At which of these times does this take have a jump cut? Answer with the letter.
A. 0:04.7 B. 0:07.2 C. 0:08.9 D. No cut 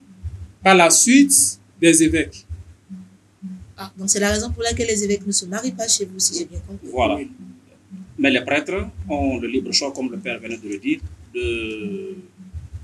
D